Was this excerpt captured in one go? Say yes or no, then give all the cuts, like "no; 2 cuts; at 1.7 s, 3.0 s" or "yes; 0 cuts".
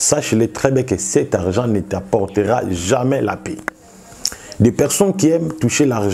yes; 0 cuts